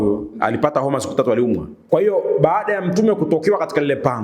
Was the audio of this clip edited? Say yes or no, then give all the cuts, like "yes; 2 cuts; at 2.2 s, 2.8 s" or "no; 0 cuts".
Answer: yes; 1 cut; at 1.7 s